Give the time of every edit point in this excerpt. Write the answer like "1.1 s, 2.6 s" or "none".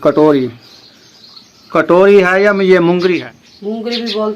3.2 s